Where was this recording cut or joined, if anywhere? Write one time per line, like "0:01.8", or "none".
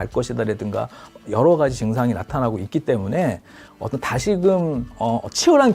0:03.7

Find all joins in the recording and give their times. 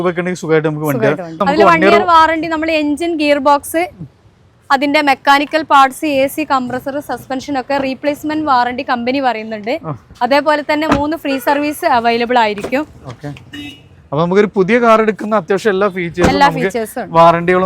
0:01.4

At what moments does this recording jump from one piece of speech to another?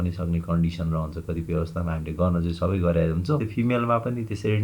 0:03.5

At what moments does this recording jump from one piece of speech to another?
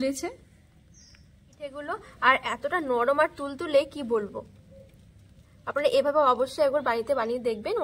0:01.8

